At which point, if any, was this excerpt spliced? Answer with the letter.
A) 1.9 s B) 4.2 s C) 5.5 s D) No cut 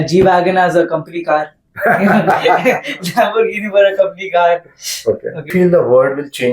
C